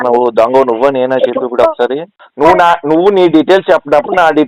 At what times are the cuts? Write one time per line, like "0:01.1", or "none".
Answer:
0:02.1